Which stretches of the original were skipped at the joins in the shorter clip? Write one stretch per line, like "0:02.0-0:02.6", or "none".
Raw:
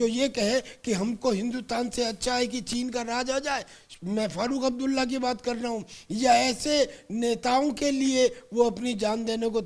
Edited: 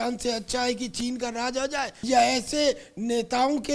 0:03.7-0:06.1